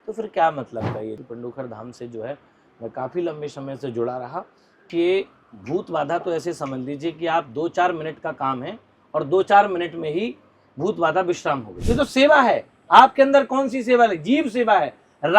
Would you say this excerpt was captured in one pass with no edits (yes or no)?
no